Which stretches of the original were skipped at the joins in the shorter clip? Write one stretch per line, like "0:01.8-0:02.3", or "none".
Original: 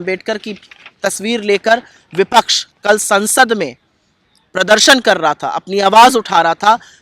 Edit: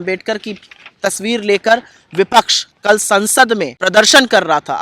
0:03.7-0:04.5